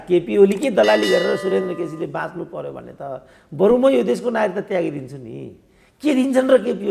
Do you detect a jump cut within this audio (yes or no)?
no